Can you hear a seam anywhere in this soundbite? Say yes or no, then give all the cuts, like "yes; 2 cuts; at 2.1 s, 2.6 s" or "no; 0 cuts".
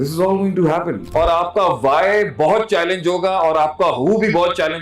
yes; 1 cut; at 1.0 s